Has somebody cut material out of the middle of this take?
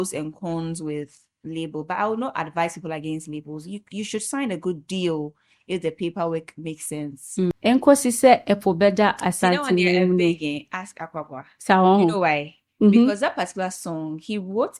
yes; 1 cut; at 7.5 s

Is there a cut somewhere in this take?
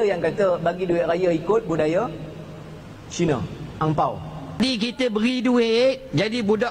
yes; 1 cut; at 4.5 s

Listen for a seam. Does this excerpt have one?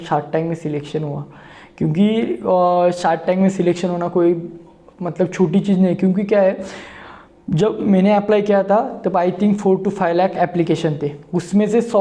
no; 0 cuts

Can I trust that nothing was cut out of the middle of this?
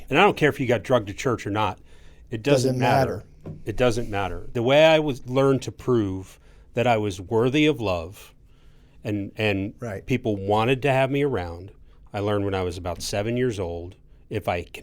no; 1 cut; at 4.5 s

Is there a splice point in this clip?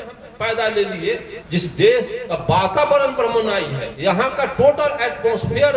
yes; 3 cuts; at 1.3 s, 2.2 s, 3.8 s

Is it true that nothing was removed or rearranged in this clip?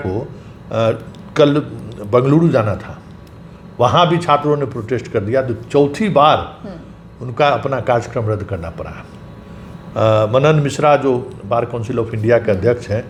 yes; 0 cuts

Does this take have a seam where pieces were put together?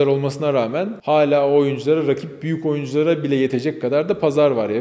yes; 1 cut; at 0.9 s

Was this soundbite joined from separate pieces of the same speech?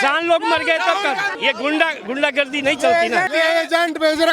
yes; 2 cuts; at 1.3 s, 3.3 s

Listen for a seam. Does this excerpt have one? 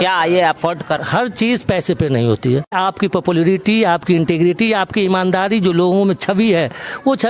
yes; 2 cuts; at 1.1 s, 2.7 s

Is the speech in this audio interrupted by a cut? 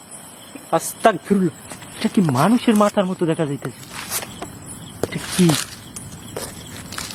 no; 0 cuts

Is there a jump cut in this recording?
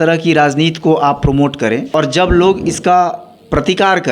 yes; 1 cut; at 1.9 s

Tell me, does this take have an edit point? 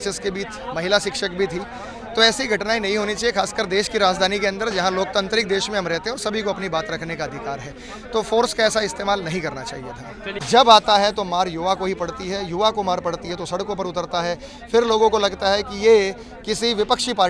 yes; 1 cut; at 10.3 s

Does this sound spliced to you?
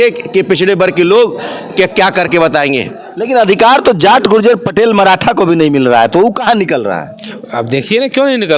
no; 0 cuts

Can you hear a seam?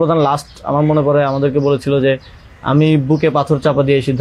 no; 0 cuts

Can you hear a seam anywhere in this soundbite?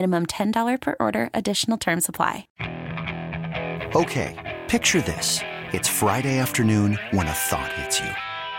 yes; 1 cut; at 2.5 s

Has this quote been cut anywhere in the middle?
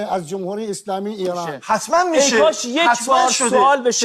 yes; 1 cut; at 1.5 s

